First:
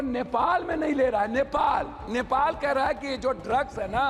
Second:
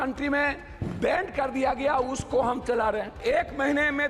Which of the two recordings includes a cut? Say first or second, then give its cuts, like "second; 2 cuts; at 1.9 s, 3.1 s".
second; 1 cut; at 3.2 s